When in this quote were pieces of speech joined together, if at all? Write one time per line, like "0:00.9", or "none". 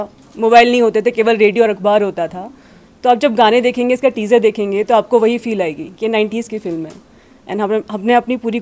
none